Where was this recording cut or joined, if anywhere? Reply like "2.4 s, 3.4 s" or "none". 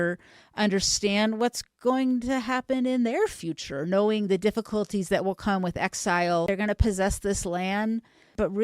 6.5 s